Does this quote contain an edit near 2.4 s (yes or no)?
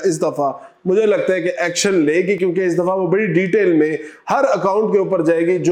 no